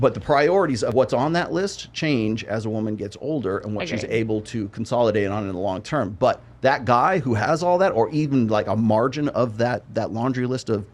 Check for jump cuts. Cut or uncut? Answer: cut